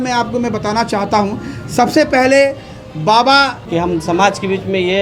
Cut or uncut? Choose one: cut